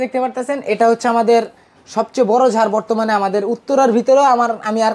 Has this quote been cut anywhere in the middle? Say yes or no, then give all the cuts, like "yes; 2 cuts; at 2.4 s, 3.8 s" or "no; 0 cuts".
no; 0 cuts